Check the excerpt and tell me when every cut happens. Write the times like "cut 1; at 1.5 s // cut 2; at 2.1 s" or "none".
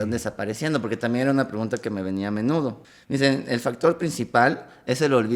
cut 1; at 2.9 s

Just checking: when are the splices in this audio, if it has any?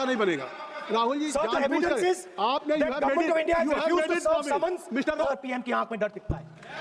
cut 1; at 5.3 s

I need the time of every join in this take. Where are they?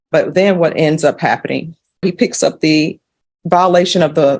cut 1; at 2.0 s

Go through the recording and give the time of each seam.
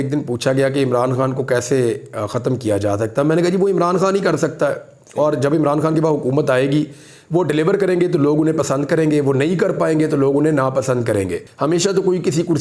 cut 1; at 11.4 s

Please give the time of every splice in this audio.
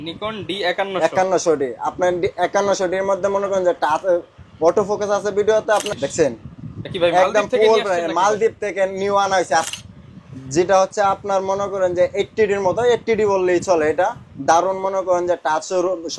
cut 1; at 5.9 s // cut 2; at 9.7 s

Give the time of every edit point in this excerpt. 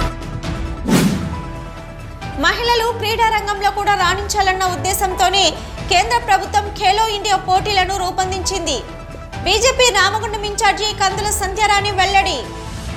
none

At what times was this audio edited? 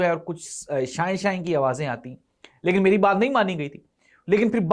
none

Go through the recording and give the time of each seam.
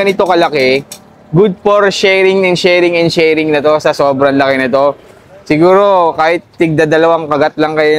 none

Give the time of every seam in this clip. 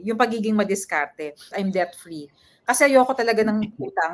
cut 1; at 1.5 s

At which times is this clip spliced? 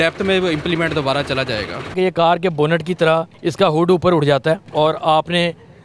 cut 1; at 1.9 s // cut 2; at 3.4 s // cut 3; at 4.6 s

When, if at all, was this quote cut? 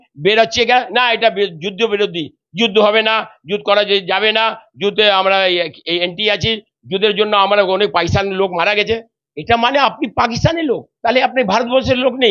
none

